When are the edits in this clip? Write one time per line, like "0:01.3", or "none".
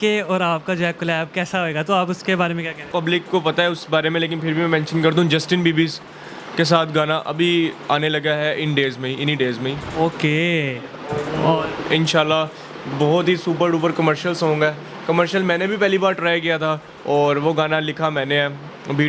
0:02.9